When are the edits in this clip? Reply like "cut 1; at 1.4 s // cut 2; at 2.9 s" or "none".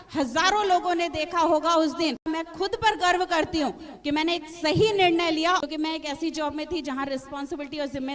cut 1; at 2.2 s // cut 2; at 5.6 s